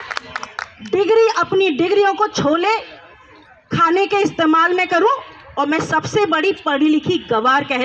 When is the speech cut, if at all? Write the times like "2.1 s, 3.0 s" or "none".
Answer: none